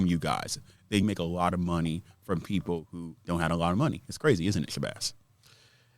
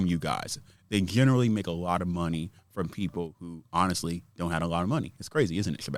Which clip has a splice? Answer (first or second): first